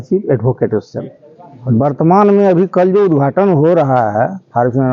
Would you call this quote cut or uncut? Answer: cut